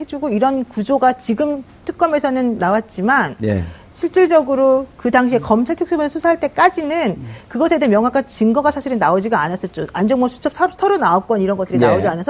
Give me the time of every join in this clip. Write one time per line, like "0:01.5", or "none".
none